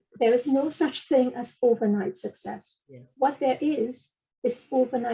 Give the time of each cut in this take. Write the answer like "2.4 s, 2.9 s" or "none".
none